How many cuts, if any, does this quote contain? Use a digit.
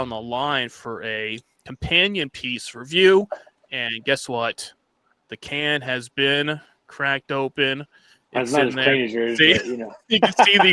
0